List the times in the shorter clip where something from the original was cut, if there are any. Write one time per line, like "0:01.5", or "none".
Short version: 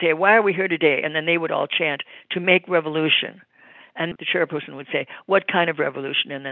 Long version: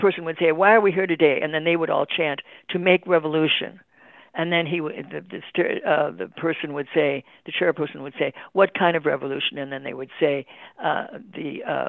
0:04.1